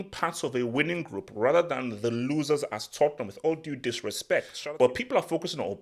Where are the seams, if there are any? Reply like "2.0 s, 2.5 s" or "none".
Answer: 4.5 s